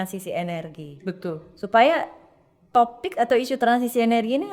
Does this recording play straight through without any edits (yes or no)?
yes